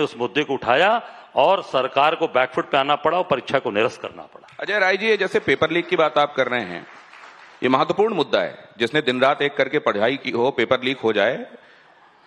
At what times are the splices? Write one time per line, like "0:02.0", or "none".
0:03.4